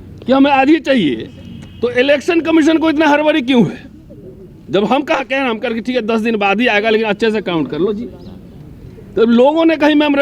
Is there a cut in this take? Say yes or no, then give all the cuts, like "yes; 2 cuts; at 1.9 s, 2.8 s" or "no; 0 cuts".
no; 0 cuts